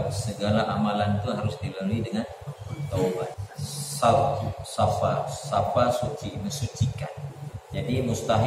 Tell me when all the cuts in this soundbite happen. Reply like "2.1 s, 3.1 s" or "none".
3.4 s, 7.3 s